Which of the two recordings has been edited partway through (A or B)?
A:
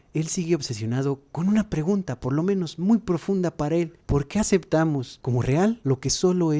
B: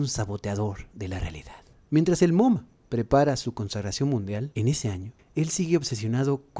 A